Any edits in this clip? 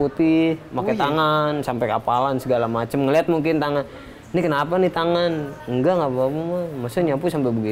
yes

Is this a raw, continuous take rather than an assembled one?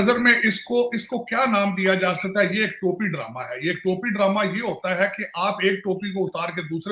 yes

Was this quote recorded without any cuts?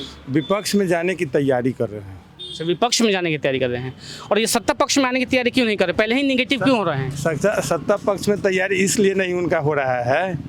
yes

